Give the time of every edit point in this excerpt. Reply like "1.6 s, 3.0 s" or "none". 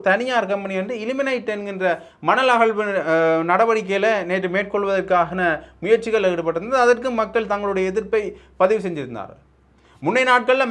none